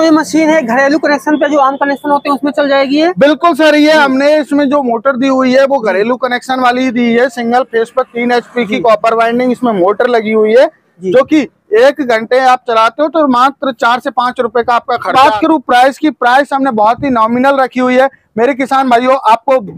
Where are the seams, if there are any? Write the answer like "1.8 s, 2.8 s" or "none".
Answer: 15.1 s